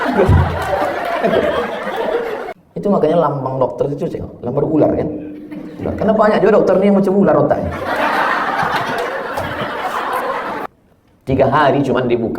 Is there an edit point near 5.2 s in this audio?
no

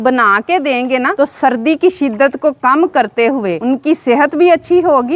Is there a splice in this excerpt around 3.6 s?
yes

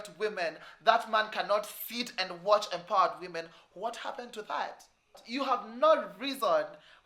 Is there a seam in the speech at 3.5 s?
no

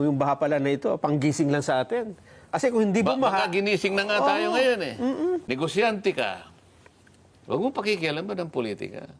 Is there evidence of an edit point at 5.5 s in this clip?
yes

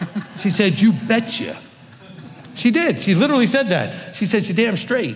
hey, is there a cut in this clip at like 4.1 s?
no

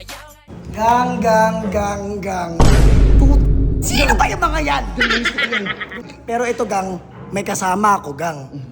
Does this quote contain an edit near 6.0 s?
yes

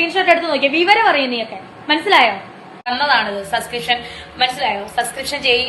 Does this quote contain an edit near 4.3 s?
no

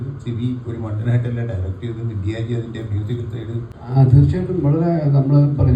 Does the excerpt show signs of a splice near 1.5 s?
no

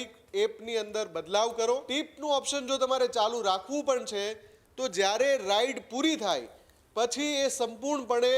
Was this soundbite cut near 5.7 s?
no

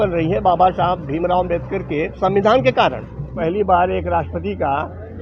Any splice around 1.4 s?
no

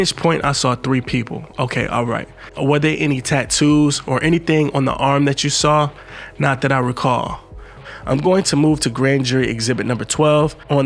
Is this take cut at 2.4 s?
yes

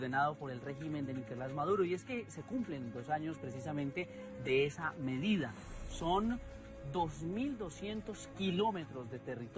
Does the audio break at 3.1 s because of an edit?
yes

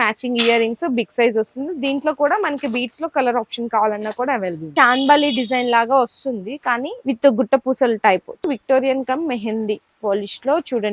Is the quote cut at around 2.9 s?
no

